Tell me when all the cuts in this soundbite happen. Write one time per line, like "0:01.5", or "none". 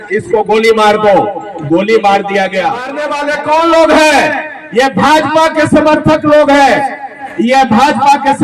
0:03.1